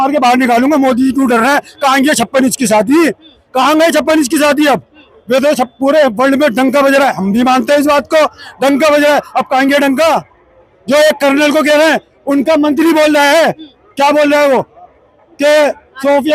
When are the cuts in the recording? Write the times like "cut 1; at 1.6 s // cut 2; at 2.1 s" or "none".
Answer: none